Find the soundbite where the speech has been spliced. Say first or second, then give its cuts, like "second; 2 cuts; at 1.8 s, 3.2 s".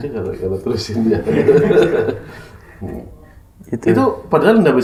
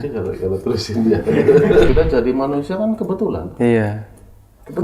second; 1 cut; at 1.9 s